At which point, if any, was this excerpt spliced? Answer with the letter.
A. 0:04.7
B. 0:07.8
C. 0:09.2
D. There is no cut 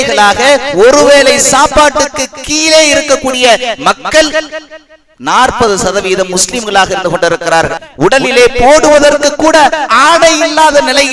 B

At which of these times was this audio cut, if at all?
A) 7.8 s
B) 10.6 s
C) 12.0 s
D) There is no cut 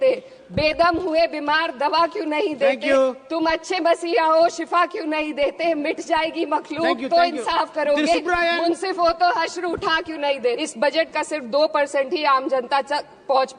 B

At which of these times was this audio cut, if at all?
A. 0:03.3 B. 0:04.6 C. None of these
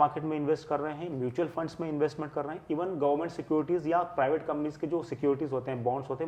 C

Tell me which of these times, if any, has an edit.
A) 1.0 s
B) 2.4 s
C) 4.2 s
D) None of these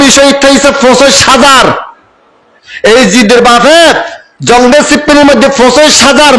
D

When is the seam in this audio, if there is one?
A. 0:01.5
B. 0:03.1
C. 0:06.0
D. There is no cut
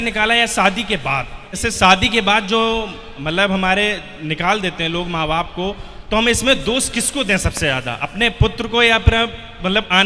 A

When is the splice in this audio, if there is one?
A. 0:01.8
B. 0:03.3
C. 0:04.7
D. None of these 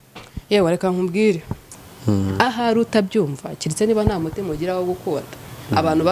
A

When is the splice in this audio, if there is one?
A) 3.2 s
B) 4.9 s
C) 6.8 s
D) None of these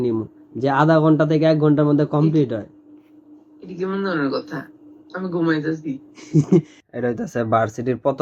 C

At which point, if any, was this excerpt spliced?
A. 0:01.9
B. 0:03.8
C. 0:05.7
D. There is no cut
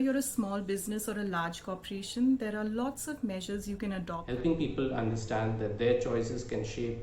B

